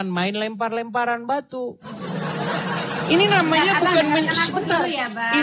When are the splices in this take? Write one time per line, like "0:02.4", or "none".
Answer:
none